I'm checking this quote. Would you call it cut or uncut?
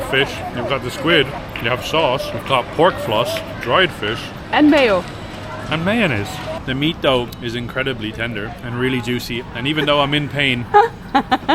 cut